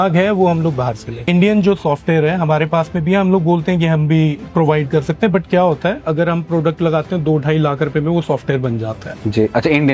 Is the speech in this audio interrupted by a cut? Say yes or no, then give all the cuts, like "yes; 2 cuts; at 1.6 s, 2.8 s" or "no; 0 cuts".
yes; 2 cuts; at 1.3 s, 6.0 s